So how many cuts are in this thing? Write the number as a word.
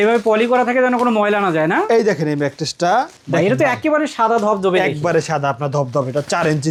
zero